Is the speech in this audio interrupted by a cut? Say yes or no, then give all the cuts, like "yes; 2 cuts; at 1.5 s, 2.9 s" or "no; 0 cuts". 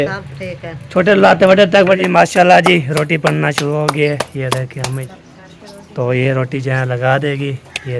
yes; 2 cuts; at 2.0 s, 5.0 s